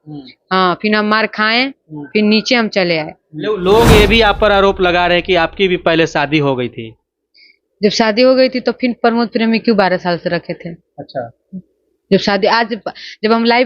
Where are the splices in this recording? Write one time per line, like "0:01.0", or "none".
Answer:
0:03.6